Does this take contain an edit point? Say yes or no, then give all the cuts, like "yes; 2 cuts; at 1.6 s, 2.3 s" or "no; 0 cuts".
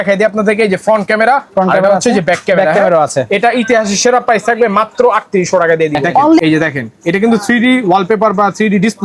yes; 1 cut; at 6.4 s